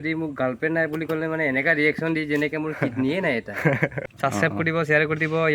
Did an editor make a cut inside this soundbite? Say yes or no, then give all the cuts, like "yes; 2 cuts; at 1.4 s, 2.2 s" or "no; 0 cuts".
yes; 1 cut; at 4.0 s